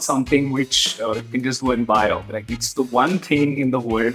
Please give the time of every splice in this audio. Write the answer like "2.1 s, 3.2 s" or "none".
none